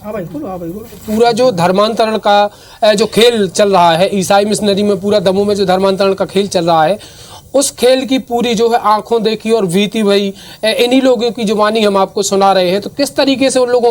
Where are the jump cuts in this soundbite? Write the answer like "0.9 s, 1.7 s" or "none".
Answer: 1.0 s